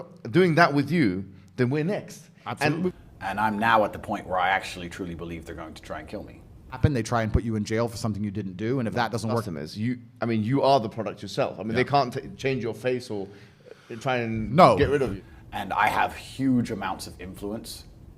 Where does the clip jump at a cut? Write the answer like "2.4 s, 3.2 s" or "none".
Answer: 2.9 s, 6.8 s, 9.5 s, 15.2 s